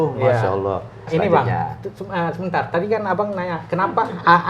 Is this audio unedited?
no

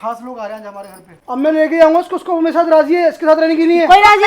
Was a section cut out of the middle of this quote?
yes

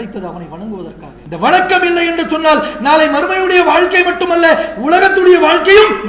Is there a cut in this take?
yes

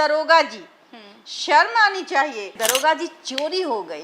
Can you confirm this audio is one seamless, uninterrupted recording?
no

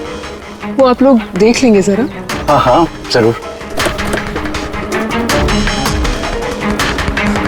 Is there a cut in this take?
no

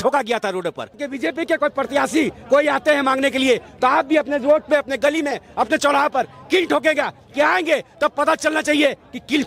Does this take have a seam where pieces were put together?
yes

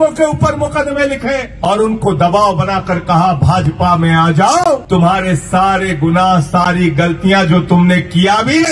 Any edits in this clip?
yes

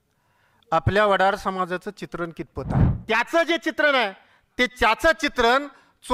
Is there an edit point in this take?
yes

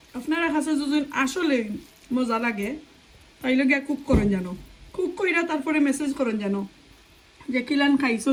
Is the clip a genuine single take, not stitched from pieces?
yes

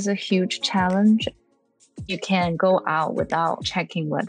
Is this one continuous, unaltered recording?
no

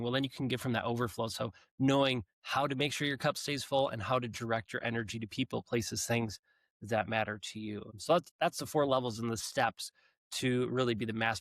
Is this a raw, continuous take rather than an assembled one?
no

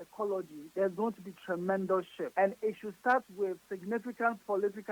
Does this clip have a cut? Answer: no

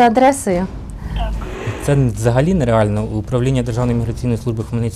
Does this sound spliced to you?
yes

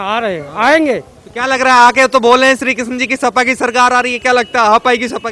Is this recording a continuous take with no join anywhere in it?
yes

